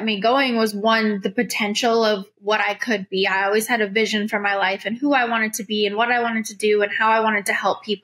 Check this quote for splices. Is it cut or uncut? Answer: uncut